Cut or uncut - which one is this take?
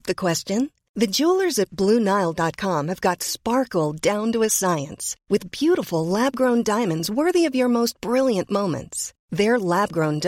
uncut